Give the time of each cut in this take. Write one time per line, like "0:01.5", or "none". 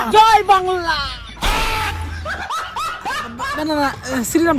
none